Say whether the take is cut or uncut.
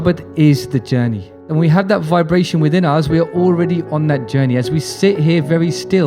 cut